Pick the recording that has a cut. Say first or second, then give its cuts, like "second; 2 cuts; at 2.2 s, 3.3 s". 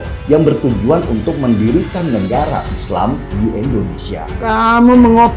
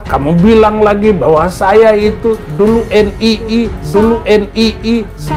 first; 1 cut; at 4.3 s